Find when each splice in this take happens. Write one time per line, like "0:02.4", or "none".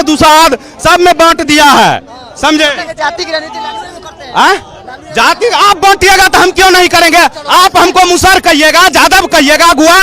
none